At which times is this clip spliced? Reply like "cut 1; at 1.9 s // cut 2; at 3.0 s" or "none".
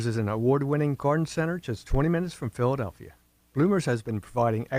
none